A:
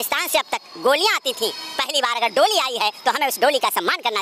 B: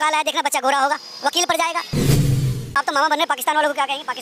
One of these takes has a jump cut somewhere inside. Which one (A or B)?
B